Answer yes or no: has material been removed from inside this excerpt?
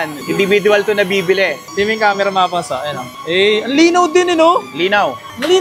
yes